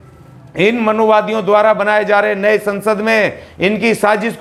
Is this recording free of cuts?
yes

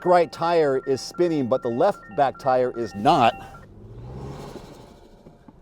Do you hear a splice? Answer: yes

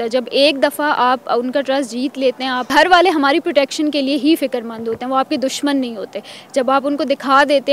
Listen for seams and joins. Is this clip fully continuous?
no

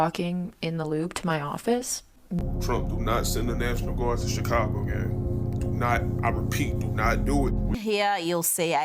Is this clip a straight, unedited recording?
no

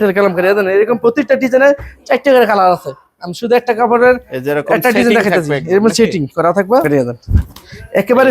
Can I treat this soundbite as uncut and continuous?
no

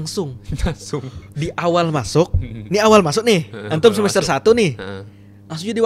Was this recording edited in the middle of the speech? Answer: no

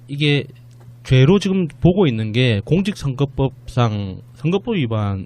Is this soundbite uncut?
no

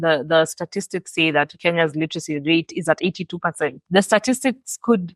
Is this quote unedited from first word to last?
no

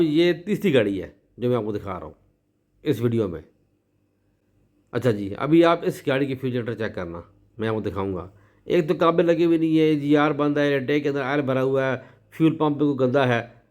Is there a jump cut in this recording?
no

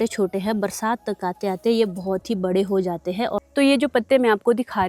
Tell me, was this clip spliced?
no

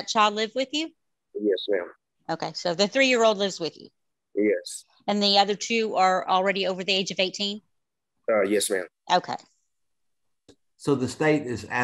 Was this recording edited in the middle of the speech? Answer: yes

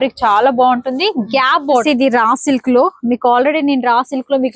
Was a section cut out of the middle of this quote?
yes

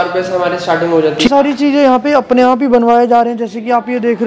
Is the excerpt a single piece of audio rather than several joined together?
no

